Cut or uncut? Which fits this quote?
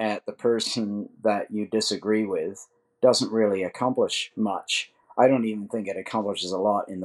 uncut